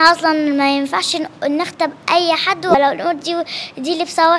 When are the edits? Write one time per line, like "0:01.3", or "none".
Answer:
0:02.7